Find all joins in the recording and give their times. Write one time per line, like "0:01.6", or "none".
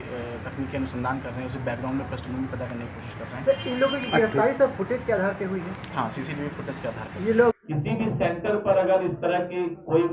0:07.6